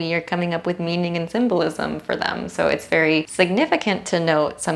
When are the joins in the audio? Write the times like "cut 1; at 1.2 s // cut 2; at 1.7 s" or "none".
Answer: cut 1; at 3.3 s